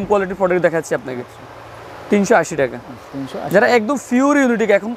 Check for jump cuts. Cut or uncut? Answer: uncut